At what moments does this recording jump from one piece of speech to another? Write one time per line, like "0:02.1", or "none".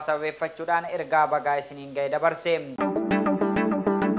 0:02.7

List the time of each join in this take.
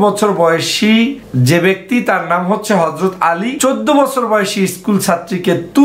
0:01.2
0:03.5

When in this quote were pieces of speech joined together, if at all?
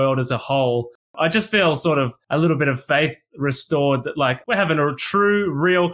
0:01.2
0:02.2
0:04.4

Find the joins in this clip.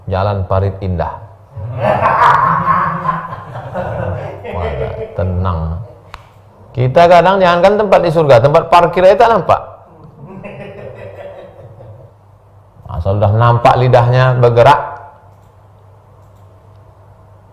0:12.2

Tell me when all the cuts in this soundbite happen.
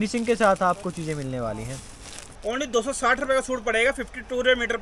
0:02.3

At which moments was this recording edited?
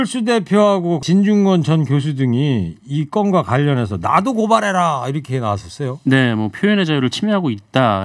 0:01.0

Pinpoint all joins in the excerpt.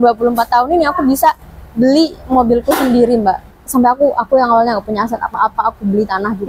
0:03.5

